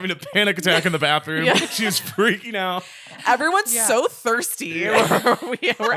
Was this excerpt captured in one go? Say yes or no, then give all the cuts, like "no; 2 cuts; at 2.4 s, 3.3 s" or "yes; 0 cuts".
yes; 0 cuts